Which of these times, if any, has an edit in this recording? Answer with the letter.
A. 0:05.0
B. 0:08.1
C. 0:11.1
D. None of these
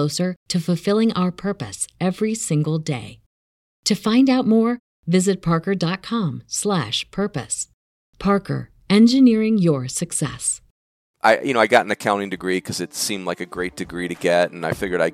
C